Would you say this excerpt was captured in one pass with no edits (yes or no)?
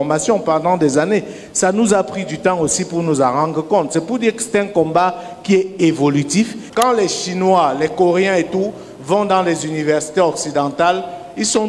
no